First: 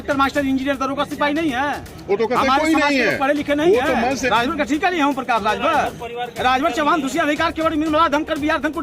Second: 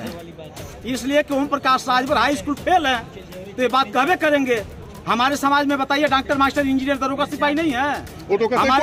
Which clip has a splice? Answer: first; 1 cut; at 4.2 s

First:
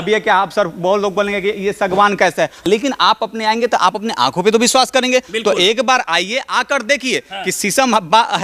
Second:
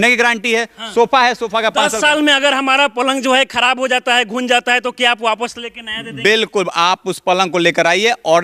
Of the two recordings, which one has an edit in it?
first; 1 cut; at 2.7 s

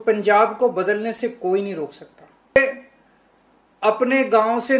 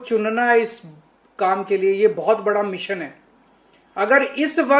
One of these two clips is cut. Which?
first; 1 cut; at 2.6 s

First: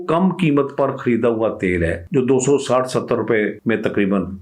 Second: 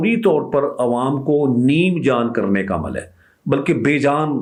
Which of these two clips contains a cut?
first; 2 cuts; at 2.0 s, 3.6 s

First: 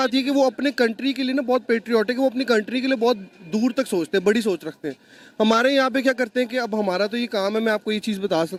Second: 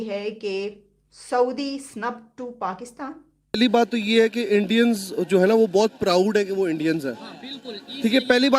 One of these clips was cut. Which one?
second; 1 cut; at 3.6 s

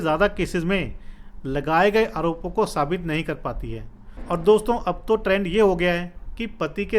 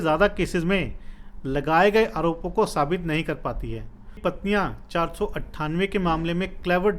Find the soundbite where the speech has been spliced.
second; 1 cut; at 4.2 s

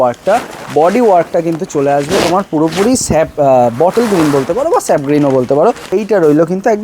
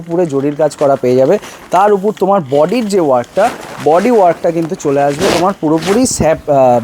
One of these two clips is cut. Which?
first; 1 cut; at 5.8 s

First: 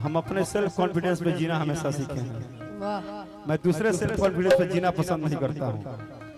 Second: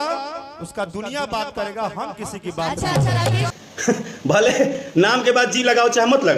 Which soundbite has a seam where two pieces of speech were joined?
second; 1 cut; at 3.5 s

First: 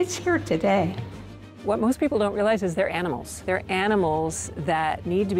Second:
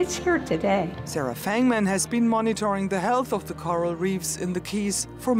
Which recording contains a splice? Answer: first; 2 cuts; at 1.0 s, 3.3 s

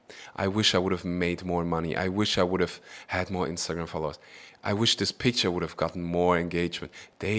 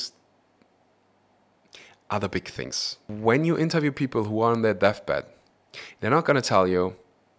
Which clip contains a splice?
second; 1 cut; at 3.1 s

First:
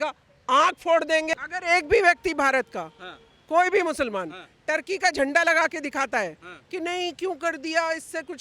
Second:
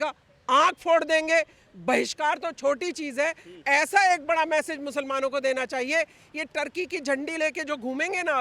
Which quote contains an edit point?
first; 1 cut; at 1.3 s

